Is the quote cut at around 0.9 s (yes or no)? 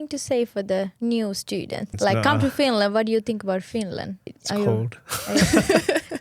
yes